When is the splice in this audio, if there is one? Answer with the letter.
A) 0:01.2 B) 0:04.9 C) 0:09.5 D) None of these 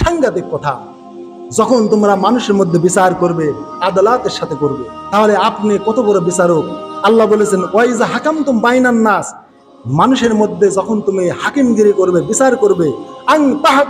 B